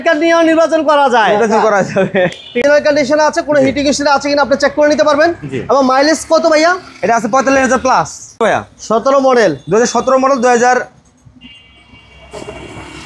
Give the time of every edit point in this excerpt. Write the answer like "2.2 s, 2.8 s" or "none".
2.6 s, 8.4 s